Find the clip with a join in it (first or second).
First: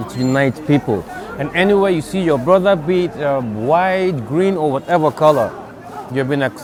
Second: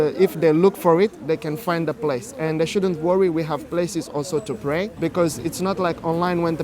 second